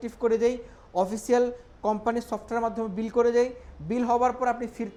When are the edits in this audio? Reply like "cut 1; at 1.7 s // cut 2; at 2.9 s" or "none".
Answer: none